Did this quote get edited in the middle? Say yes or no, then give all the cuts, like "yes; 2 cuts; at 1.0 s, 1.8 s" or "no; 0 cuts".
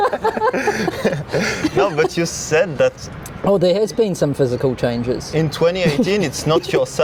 no; 0 cuts